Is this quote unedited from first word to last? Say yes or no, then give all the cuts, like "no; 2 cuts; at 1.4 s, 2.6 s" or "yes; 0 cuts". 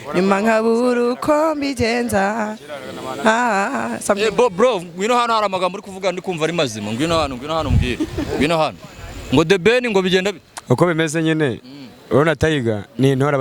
yes; 0 cuts